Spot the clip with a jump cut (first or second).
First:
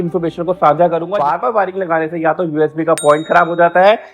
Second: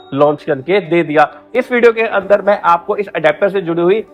first